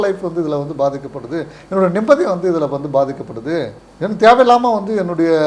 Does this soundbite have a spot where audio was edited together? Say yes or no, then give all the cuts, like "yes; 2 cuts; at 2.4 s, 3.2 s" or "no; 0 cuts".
no; 0 cuts